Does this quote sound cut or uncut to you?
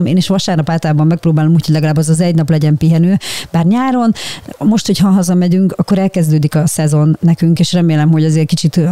uncut